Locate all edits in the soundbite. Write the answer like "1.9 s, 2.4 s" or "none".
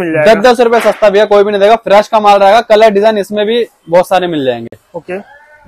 none